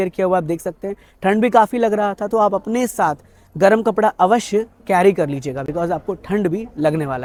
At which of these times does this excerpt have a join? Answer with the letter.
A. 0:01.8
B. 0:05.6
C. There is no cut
C